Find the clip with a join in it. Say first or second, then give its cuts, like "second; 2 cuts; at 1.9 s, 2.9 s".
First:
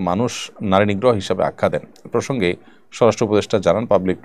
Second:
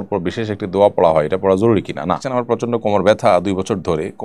second; 1 cut; at 2.2 s